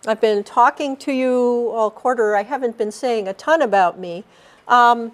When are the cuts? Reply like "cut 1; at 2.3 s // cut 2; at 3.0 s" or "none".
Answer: none

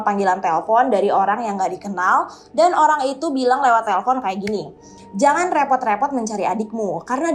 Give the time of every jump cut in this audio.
none

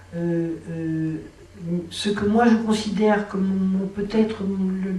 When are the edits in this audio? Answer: none

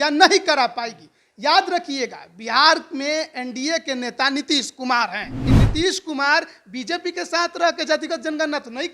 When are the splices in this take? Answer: cut 1; at 5.5 s

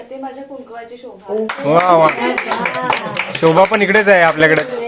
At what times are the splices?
none

